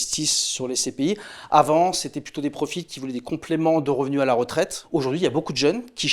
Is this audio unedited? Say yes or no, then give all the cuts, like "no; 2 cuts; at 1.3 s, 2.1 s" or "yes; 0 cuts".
no; 1 cut; at 4.8 s